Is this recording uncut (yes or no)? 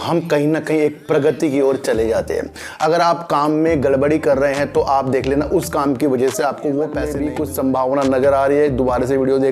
no